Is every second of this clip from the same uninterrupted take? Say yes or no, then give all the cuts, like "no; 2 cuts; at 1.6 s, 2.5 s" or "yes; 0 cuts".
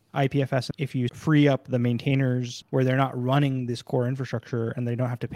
no; 2 cuts; at 0.9 s, 2.6 s